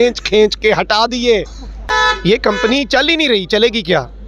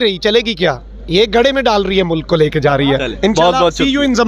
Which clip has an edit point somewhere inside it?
first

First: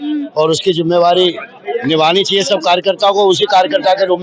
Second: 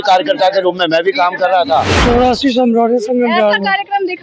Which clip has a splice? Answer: second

